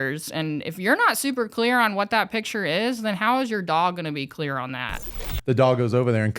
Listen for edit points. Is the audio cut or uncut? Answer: cut